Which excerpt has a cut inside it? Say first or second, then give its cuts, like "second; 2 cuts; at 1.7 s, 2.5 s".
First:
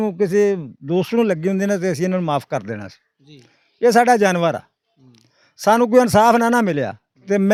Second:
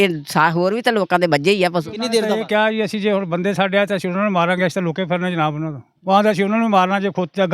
second; 1 cut; at 2.3 s